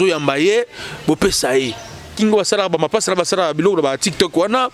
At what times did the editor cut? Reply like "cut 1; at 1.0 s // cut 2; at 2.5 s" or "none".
cut 1; at 2.1 s